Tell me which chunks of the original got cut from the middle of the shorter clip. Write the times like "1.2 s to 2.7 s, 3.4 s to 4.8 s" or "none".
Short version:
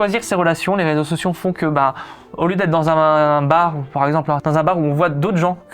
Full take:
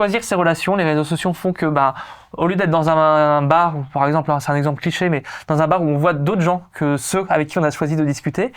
4.4 s to 5.5 s